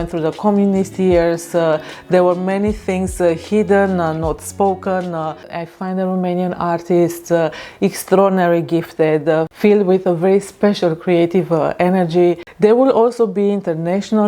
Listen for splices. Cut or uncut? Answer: cut